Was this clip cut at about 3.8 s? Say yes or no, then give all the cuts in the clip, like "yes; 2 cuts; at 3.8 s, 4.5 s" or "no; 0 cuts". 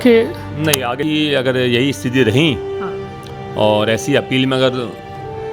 no; 1 cut; at 1.0 s